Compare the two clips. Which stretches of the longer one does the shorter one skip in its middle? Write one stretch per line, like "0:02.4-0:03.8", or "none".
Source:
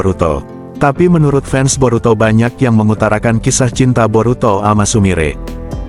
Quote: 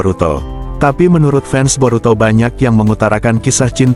none